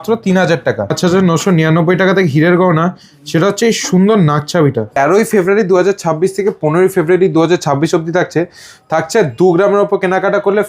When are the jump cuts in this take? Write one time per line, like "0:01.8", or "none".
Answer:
0:00.9
0:04.9